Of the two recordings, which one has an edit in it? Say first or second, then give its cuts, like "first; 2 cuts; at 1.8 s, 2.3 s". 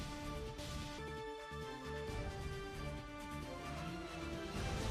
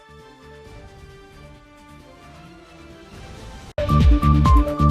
second; 1 cut; at 3.7 s